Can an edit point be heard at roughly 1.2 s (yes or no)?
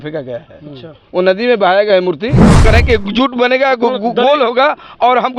no